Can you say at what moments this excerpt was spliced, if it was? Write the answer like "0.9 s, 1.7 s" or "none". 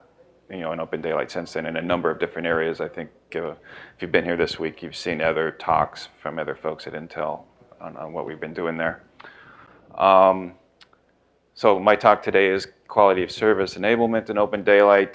12.4 s